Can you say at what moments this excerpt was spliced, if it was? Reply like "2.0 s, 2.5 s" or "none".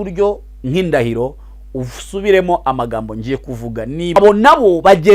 4.2 s